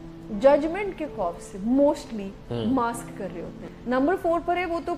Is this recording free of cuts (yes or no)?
no